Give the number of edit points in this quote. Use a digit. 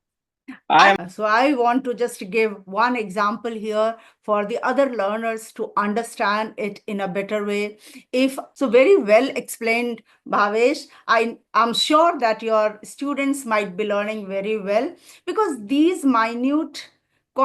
2